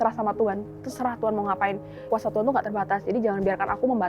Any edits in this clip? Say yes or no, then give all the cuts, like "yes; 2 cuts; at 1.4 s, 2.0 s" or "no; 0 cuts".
yes; 1 cut; at 2.0 s